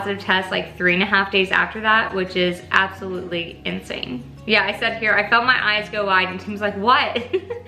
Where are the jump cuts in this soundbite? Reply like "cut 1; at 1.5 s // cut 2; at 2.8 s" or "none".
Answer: none